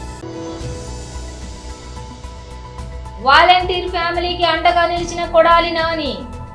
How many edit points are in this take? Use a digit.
1